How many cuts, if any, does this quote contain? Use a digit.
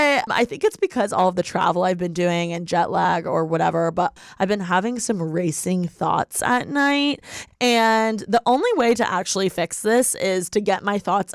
2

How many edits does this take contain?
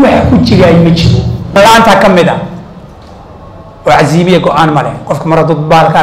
1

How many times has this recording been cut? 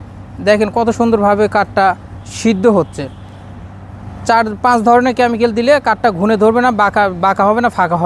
0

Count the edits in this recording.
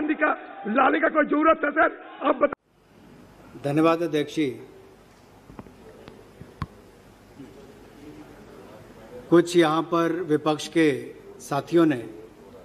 0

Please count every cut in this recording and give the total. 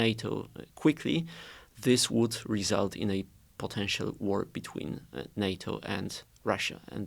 0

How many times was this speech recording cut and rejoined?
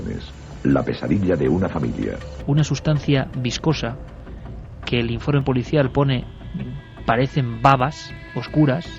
1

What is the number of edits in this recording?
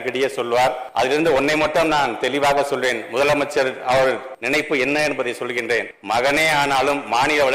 3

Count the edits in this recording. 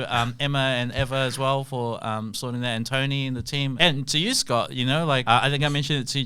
2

